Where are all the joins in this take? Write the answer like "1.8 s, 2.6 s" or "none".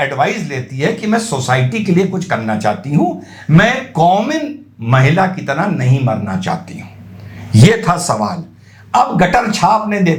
none